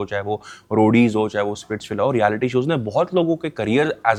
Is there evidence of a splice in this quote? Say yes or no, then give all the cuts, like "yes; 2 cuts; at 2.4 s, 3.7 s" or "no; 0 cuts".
no; 0 cuts